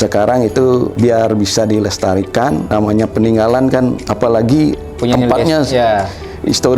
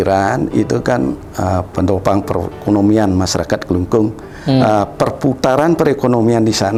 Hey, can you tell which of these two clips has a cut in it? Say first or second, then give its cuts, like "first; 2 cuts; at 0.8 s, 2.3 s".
first; 3 cuts; at 0.9 s, 2.7 s, 4.0 s